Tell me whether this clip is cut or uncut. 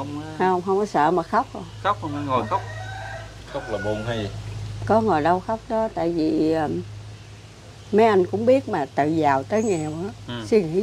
uncut